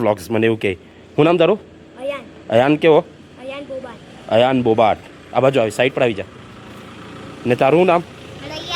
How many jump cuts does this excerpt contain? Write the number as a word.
zero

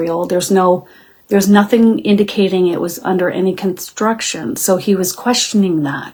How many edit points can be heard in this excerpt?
zero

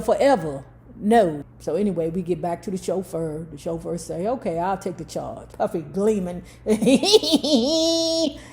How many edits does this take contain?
two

